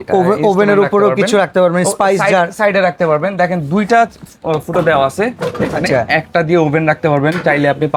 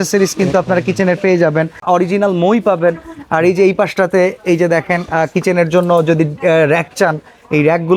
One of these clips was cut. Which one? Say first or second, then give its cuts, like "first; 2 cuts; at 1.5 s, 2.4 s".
second; 1 cut; at 1.8 s